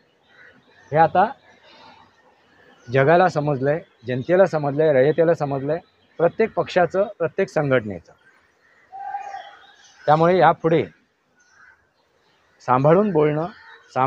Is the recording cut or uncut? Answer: uncut